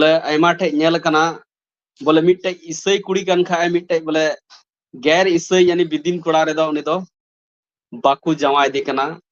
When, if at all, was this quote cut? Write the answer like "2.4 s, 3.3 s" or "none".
none

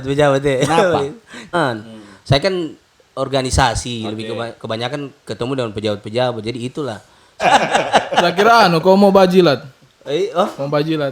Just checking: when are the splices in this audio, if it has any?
1.5 s, 7.4 s

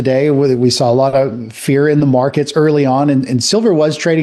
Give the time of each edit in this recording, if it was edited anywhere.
none

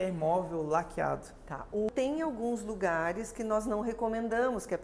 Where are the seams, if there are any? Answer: 1.9 s

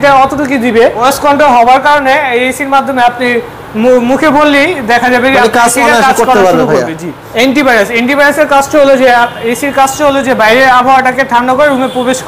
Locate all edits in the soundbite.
1.0 s, 7.2 s

